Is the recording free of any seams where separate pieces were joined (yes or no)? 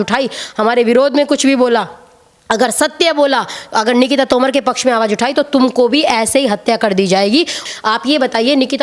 no